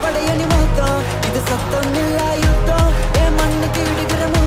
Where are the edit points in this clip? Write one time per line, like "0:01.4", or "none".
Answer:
none